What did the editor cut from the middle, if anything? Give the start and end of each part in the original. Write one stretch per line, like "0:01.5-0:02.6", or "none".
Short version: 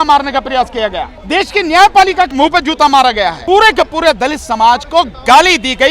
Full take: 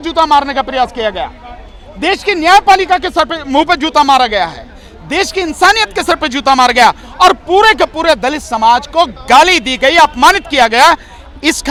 0:01.3-0:01.8
0:03.0-0:03.5
0:04.6-0:07.4

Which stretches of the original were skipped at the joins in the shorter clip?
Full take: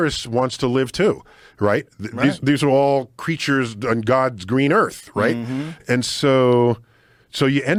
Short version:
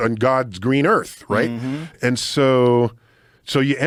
none

